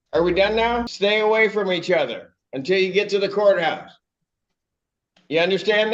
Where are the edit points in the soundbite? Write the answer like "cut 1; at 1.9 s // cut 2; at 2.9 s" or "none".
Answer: cut 1; at 0.9 s